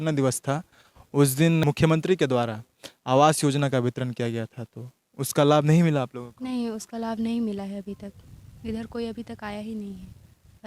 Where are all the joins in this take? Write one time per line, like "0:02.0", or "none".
0:01.6